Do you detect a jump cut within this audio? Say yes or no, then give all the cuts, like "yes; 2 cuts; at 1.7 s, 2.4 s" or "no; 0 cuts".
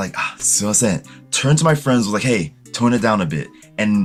no; 0 cuts